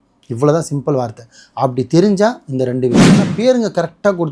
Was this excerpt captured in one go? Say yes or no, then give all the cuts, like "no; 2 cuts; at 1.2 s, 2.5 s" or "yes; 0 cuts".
no; 1 cut; at 3.2 s